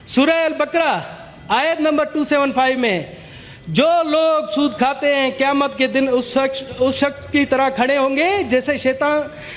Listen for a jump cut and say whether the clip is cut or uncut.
uncut